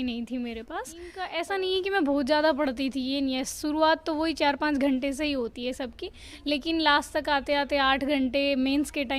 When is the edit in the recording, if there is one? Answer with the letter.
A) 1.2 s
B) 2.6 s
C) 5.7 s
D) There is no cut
A